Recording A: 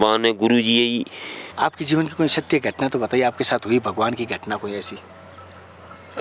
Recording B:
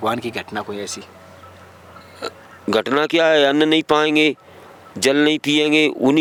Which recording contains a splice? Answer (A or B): A